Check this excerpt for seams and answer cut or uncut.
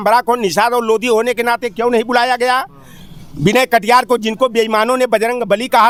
uncut